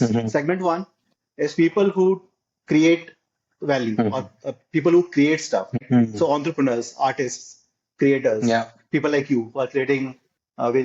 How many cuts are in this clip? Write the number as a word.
zero